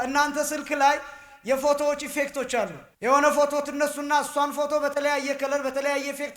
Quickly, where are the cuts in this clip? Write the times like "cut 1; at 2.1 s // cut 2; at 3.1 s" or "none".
cut 1; at 2.8 s